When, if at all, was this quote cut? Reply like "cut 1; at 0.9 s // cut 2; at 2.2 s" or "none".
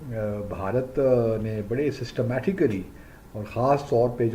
none